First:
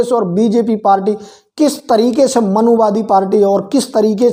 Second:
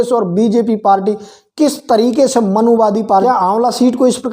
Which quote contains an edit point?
second; 1 cut; at 3.2 s

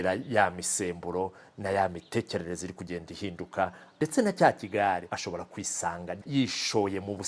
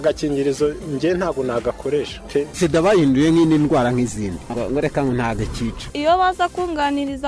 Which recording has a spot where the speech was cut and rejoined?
first; 1 cut; at 6.2 s

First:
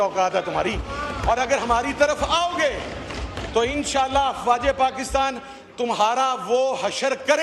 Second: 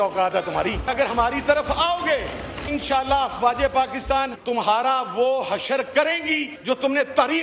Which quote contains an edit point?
second; 4 cuts; at 1.3 s, 2.7 s, 4.4 s, 6.5 s

